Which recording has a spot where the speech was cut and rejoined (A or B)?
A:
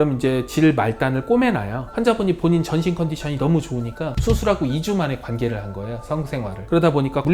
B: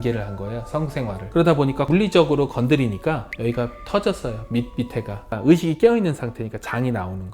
B